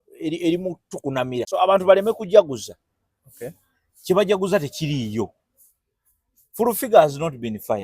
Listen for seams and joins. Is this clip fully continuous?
no; 1 cut; at 1.4 s

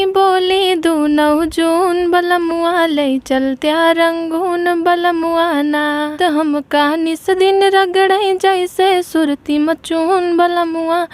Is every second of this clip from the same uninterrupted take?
no; 1 cut; at 6.1 s

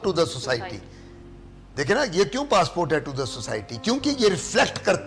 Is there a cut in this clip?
no; 0 cuts

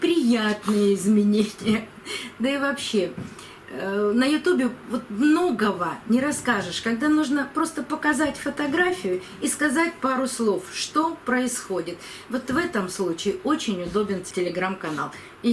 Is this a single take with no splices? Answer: yes; 0 cuts

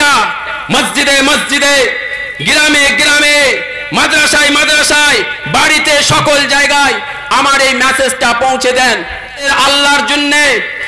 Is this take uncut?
no; 1 cut; at 9.5 s

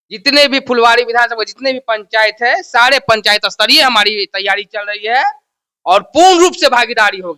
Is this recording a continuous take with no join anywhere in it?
yes; 0 cuts

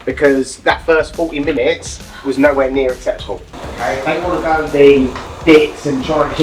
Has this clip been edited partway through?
yes; 2 cuts; at 3.5 s, 5.3 s

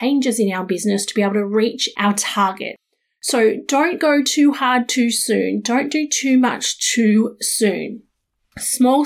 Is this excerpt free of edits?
no; 2 cuts; at 1.8 s, 2.7 s

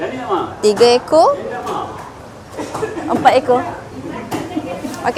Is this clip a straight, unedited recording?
yes; 0 cuts

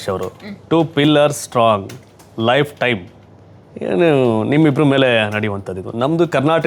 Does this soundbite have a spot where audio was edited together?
no; 0 cuts

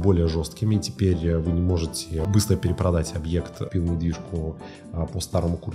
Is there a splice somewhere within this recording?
yes; 1 cut; at 3.7 s

